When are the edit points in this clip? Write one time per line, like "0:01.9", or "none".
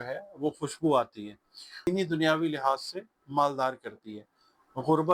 0:01.9